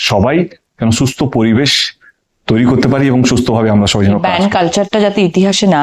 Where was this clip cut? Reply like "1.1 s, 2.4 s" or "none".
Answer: 4.2 s